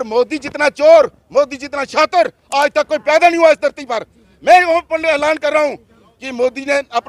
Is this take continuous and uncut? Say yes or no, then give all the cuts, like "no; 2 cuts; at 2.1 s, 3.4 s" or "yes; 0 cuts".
yes; 0 cuts